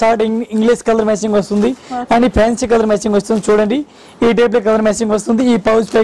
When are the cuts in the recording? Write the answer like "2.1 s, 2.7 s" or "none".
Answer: none